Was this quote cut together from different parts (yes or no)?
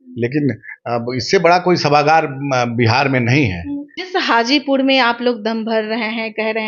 yes